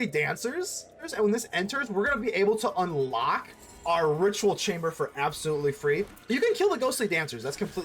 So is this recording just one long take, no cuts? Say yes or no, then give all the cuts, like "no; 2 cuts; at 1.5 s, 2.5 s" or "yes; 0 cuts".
no; 2 cuts; at 1.0 s, 6.2 s